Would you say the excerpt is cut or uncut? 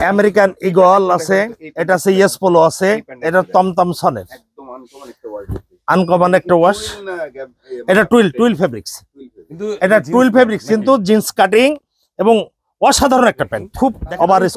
cut